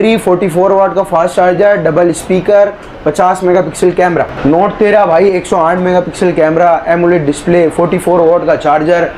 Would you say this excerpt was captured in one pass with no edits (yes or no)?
no